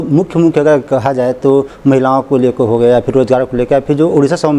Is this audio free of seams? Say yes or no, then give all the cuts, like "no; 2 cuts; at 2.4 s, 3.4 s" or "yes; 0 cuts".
yes; 0 cuts